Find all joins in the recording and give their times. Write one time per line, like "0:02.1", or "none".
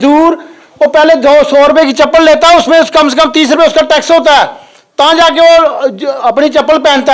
none